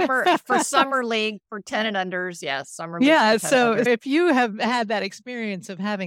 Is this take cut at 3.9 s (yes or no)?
yes